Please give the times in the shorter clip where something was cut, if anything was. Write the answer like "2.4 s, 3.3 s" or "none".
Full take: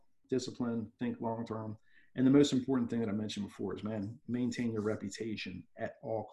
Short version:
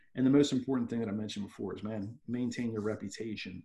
none